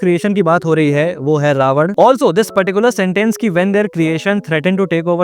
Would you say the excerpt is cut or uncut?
cut